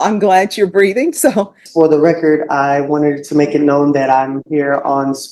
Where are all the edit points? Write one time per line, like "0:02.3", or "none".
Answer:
0:01.6